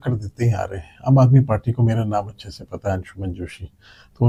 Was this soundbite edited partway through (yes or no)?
no